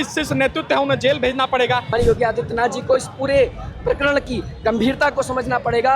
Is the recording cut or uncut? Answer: cut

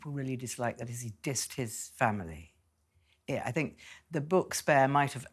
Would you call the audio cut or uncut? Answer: uncut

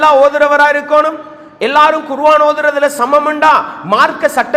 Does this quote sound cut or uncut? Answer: uncut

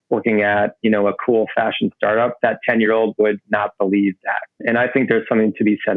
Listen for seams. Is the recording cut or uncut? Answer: cut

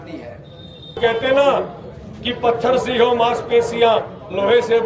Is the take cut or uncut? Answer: cut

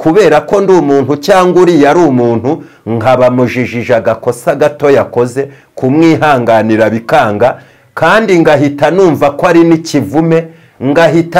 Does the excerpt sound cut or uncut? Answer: uncut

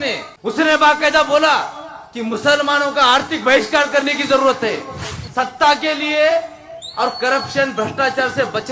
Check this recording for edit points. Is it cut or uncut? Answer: cut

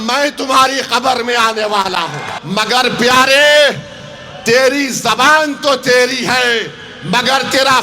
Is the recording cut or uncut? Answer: cut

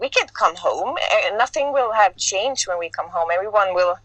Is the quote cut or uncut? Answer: uncut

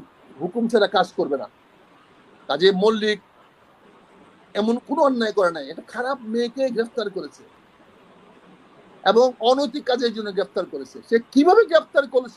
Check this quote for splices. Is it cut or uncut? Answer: uncut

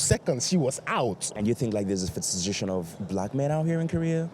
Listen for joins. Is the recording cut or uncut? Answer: cut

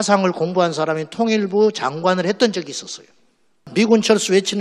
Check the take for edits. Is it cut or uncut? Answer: cut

